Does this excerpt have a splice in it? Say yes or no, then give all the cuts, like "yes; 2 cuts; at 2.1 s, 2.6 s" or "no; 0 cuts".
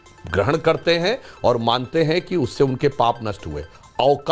no; 0 cuts